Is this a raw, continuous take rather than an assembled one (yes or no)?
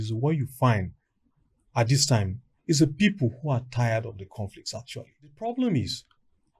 no